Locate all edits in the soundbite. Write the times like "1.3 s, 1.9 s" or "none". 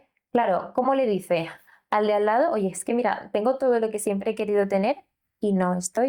none